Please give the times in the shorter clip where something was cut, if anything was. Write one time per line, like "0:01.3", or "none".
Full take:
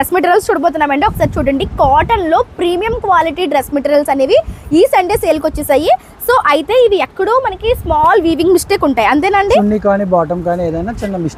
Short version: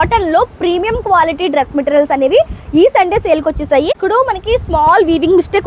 0:03.9